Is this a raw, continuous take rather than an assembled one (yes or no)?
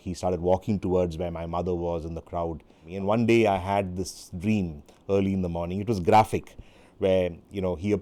no